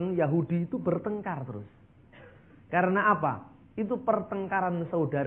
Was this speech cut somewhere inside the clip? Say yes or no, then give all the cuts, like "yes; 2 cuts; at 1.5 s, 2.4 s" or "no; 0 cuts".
no; 0 cuts